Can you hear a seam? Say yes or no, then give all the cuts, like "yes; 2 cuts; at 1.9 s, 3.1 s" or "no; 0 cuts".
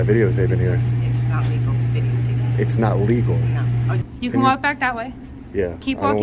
yes; 1 cut; at 4.0 s